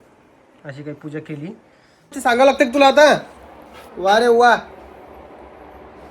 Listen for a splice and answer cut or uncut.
cut